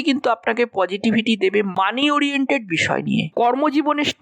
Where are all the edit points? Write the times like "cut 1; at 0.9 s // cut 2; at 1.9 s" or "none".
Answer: cut 1; at 3.3 s